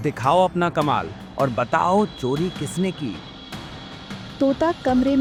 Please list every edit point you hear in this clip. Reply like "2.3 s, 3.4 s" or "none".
none